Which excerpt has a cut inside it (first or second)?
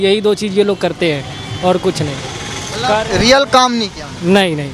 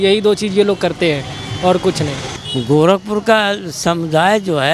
second